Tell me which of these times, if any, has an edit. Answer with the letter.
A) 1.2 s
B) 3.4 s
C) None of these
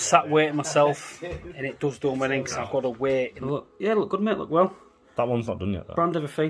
B